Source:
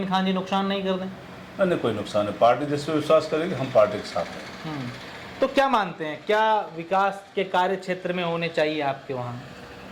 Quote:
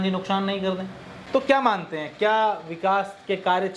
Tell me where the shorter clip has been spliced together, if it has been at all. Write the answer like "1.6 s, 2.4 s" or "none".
1.2 s